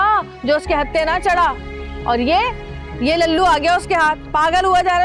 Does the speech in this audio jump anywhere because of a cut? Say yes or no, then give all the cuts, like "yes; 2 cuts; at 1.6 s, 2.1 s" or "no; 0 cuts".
no; 0 cuts